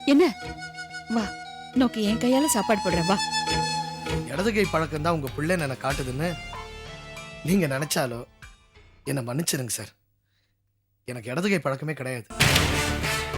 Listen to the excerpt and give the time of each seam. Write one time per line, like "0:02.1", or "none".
0:04.3